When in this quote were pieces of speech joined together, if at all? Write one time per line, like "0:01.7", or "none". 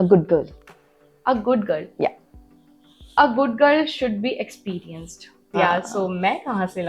0:05.3